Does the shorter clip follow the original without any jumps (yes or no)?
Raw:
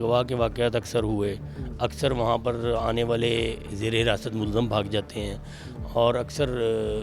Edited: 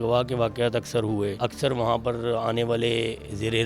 no